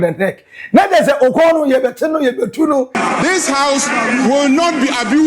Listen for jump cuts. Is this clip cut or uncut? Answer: cut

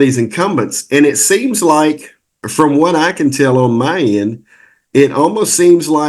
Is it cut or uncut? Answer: cut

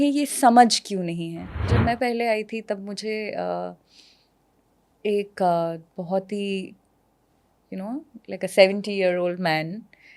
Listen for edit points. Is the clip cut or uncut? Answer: cut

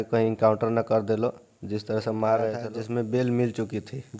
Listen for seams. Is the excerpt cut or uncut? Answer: cut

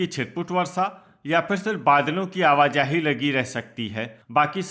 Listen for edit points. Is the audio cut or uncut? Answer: uncut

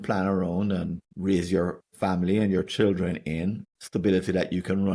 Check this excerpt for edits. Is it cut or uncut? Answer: cut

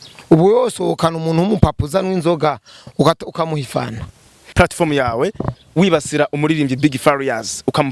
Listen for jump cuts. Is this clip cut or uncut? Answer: cut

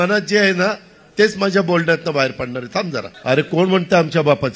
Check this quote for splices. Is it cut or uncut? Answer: cut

